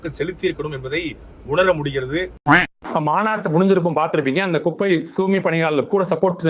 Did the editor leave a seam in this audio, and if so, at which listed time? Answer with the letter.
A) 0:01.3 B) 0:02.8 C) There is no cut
B